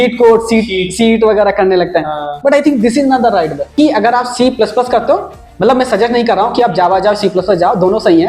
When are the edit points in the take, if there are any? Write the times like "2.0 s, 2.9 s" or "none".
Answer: 3.7 s